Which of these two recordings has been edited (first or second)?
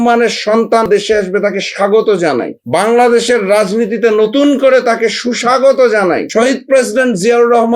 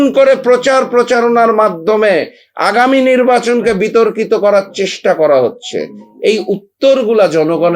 first